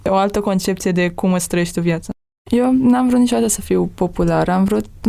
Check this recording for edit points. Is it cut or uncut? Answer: cut